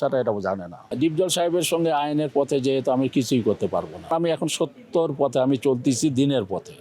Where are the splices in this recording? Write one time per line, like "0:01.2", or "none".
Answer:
0:00.9
0:04.1